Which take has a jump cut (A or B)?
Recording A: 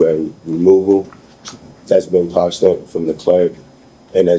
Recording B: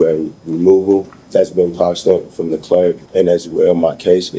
B